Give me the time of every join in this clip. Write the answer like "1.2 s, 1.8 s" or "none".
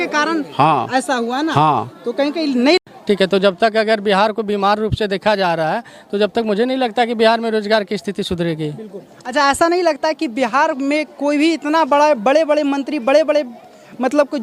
2.8 s